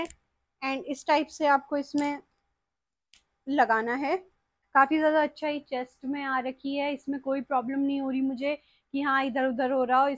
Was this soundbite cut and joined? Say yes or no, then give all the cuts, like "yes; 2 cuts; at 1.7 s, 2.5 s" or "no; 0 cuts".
yes; 1 cut; at 4.5 s